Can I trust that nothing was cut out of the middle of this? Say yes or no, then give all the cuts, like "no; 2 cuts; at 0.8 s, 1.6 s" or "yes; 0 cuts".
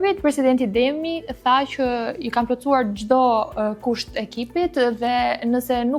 yes; 0 cuts